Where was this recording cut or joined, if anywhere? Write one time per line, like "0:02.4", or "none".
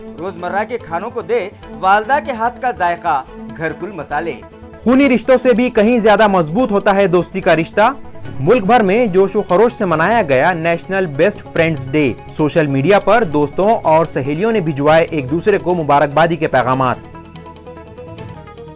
none